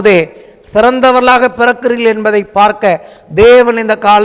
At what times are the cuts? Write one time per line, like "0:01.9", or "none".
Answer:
none